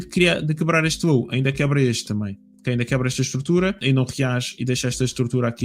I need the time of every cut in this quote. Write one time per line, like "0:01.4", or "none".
0:03.8